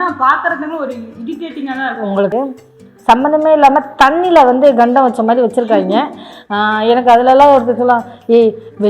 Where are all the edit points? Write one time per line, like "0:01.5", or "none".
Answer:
0:02.3